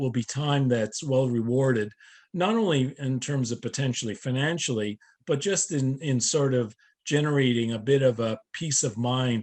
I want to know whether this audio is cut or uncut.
uncut